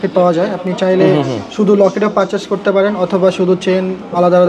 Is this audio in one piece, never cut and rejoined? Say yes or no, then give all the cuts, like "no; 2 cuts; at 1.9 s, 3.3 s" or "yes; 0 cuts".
yes; 0 cuts